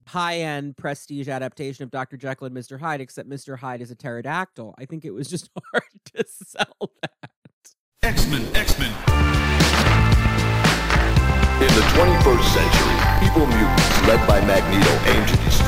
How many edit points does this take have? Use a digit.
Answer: 1